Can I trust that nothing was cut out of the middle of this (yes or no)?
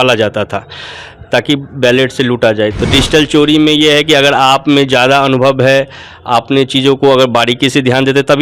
no